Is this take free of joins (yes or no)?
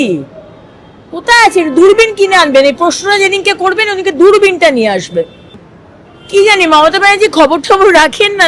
no